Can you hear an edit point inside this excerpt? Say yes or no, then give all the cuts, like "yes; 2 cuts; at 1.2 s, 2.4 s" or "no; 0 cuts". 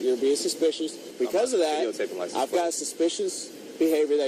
yes; 1 cut; at 1.1 s